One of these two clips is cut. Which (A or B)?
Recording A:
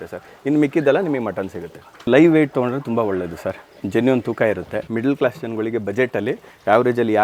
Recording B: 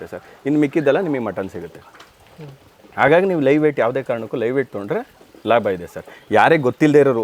A